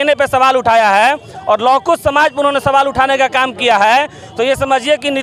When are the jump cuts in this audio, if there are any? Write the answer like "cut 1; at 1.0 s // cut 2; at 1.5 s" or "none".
none